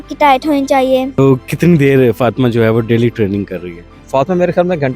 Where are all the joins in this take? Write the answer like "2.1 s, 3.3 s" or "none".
1.1 s